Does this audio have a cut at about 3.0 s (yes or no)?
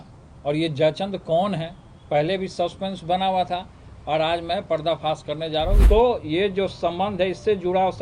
no